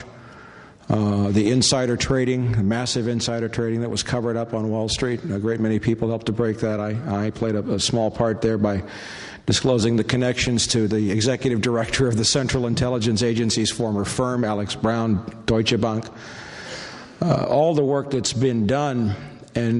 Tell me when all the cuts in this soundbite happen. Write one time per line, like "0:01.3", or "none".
none